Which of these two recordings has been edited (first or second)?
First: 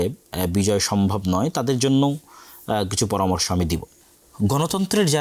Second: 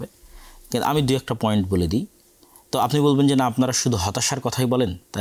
first